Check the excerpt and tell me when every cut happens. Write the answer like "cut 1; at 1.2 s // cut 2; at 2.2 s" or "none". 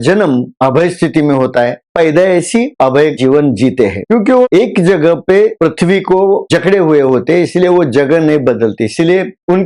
cut 1; at 1.8 s // cut 2; at 3.1 s